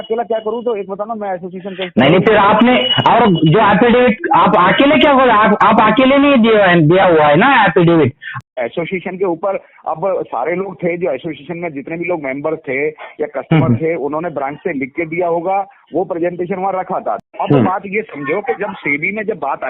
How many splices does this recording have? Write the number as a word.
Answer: two